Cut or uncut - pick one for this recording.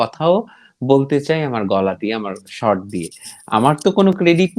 uncut